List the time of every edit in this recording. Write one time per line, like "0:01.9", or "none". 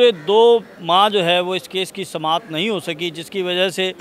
none